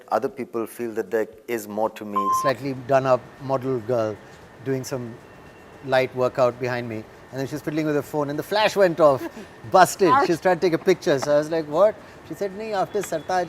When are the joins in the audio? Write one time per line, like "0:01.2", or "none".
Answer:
0:02.3